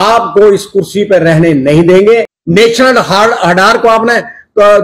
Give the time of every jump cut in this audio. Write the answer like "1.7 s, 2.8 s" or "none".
2.4 s